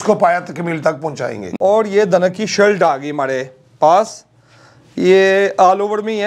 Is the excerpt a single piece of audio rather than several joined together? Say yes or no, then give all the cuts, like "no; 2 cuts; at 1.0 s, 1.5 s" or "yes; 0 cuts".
no; 1 cut; at 1.3 s